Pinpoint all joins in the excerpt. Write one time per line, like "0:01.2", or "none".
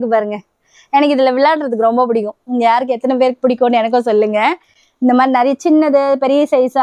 none